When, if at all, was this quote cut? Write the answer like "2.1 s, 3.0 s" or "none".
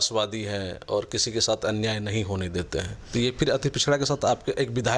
none